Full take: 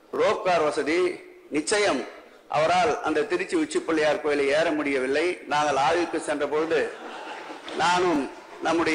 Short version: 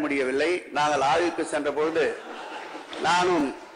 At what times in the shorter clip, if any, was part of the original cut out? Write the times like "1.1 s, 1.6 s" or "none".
none